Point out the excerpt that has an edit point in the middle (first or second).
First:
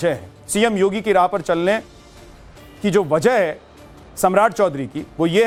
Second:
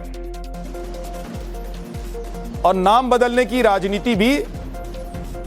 second